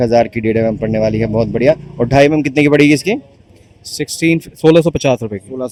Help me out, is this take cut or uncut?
uncut